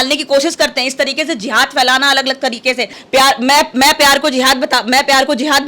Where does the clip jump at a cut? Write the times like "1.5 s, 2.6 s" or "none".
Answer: 3.0 s